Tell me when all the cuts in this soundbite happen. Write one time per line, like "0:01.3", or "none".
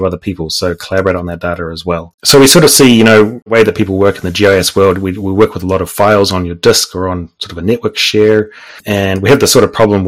0:02.1
0:03.5
0:08.8